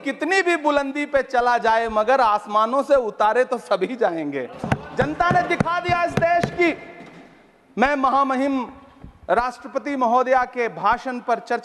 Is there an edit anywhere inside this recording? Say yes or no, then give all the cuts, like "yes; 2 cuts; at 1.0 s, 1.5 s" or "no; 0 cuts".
no; 0 cuts